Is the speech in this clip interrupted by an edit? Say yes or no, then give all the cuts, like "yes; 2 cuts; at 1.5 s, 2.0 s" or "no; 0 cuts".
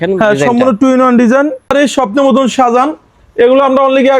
yes; 1 cut; at 1.7 s